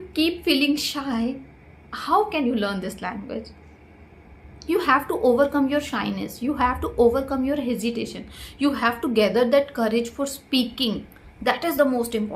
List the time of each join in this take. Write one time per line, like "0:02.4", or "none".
none